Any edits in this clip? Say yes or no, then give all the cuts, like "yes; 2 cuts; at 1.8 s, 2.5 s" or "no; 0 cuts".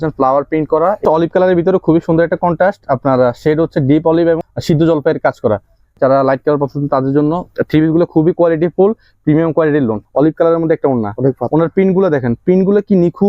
yes; 4 cuts; at 1.0 s, 4.5 s, 6.0 s, 10.0 s